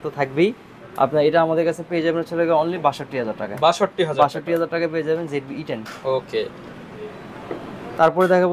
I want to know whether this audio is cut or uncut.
uncut